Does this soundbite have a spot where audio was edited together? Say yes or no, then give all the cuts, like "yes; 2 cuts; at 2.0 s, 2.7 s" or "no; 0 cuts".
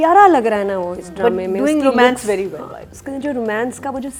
no; 0 cuts